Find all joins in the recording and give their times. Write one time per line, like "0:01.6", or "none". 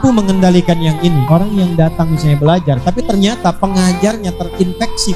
0:01.2